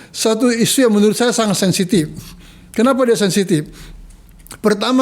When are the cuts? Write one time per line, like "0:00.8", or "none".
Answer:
none